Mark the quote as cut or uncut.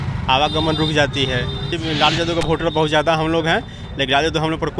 cut